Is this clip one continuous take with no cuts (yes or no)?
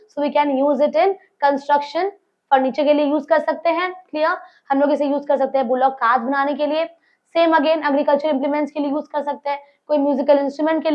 yes